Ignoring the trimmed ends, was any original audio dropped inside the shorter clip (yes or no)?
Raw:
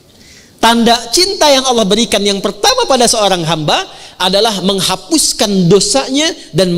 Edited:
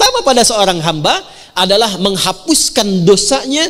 no